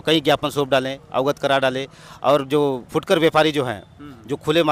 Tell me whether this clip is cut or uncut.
uncut